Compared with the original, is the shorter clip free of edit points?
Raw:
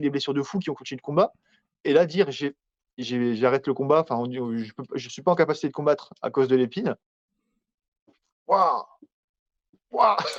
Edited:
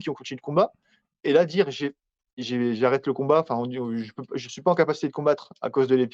yes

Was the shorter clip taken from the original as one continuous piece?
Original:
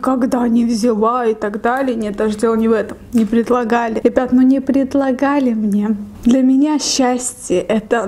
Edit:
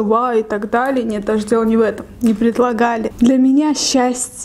no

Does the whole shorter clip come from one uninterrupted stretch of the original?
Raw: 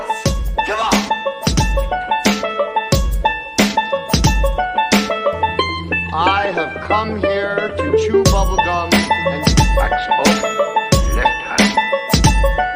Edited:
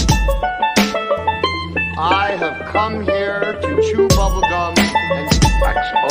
no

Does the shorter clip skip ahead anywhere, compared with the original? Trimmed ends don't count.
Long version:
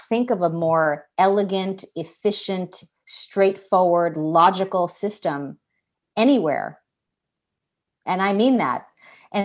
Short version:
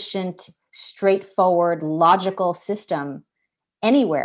no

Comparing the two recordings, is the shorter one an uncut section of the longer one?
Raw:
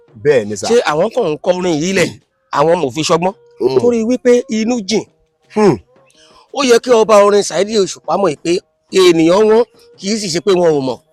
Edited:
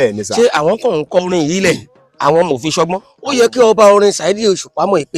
no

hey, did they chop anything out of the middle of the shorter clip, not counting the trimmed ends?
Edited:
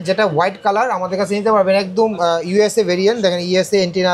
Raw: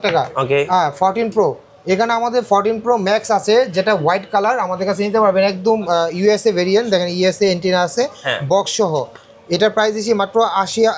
no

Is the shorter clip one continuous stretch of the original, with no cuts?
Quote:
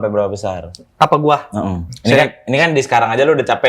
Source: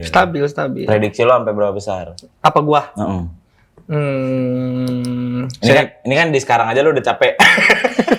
no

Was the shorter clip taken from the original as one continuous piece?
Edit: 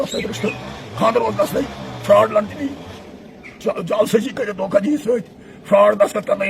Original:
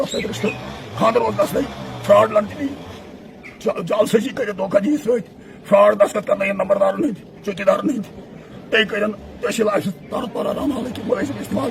yes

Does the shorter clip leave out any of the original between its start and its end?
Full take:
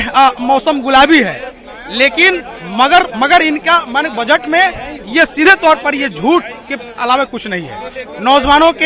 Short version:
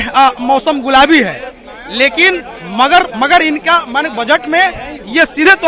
no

